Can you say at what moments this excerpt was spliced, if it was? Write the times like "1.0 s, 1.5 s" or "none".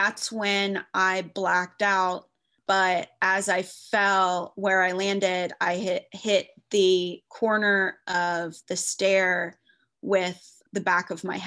2.5 s, 10.6 s